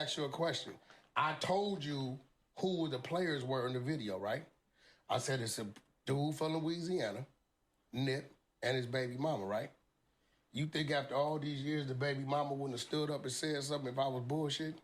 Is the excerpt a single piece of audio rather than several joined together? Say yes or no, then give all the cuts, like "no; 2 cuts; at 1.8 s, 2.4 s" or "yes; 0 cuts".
yes; 0 cuts